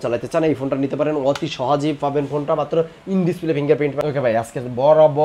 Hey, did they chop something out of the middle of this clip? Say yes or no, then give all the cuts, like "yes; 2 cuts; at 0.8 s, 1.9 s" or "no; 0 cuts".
yes; 1 cut; at 4.0 s